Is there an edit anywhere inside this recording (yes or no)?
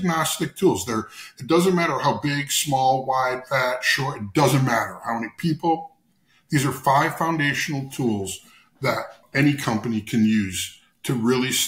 yes